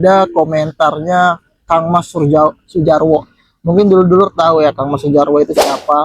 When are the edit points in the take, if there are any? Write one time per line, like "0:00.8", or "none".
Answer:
none

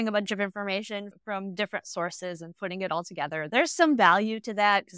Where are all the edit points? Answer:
0:01.1

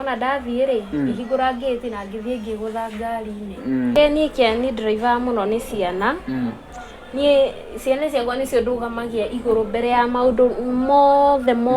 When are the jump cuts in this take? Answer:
0:03.9

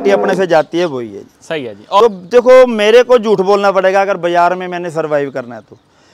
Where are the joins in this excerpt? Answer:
0:02.0

